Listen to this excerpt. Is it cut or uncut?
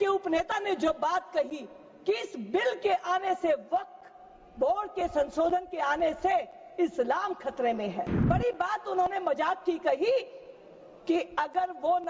cut